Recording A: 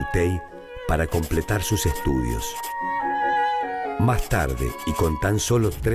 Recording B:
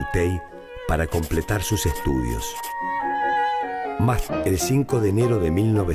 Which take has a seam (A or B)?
A